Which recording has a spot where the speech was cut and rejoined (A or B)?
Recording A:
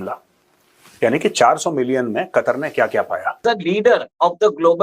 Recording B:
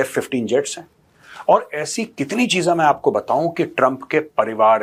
A